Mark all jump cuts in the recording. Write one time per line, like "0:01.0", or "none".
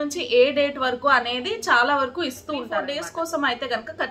0:02.5